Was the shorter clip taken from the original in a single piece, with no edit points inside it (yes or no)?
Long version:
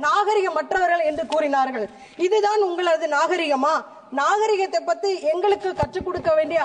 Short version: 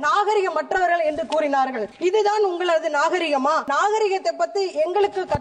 no